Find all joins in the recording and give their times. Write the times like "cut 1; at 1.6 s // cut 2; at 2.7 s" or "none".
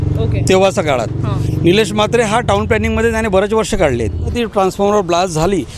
cut 1; at 4.3 s